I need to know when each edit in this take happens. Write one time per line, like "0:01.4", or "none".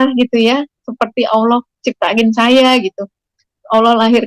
none